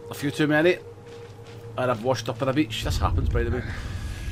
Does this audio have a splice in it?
no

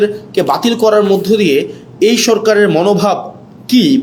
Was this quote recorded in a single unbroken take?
yes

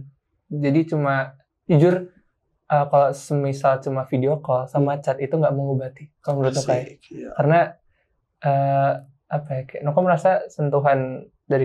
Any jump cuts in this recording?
no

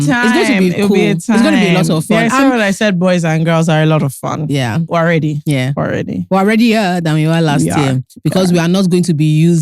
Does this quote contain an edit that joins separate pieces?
yes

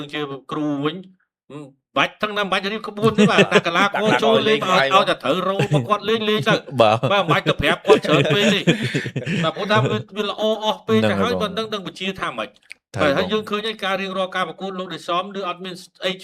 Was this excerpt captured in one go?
yes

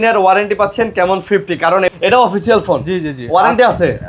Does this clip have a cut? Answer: yes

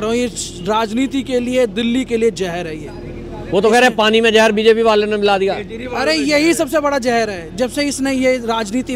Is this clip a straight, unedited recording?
yes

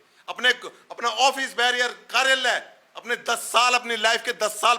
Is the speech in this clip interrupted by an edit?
no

